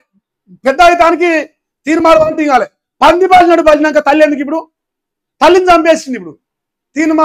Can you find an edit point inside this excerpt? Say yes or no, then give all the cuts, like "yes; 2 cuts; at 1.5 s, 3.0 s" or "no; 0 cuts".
no; 0 cuts